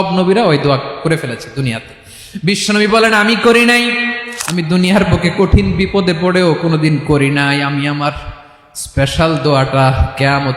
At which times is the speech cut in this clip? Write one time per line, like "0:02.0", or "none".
0:04.2